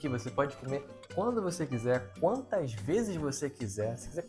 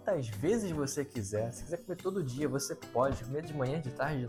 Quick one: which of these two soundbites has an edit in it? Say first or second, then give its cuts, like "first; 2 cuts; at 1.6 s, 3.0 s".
first; 1 cut; at 1.0 s